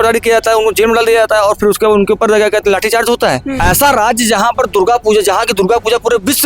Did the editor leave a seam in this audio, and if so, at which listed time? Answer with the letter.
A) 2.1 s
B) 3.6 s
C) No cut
B